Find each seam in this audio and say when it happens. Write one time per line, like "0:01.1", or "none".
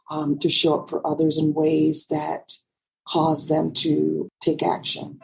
0:04.3